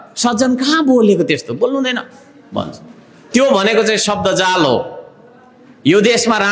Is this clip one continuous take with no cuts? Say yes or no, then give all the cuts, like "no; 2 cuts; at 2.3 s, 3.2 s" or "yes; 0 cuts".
yes; 0 cuts